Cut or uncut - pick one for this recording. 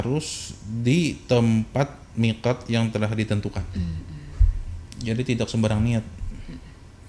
uncut